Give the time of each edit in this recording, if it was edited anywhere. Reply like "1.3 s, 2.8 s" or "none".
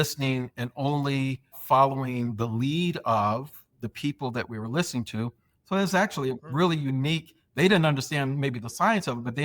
1.6 s, 3.7 s, 5.5 s